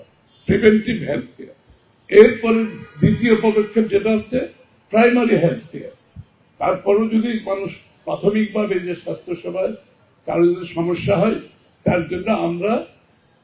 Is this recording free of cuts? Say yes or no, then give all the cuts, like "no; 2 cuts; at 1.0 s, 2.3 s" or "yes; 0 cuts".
yes; 0 cuts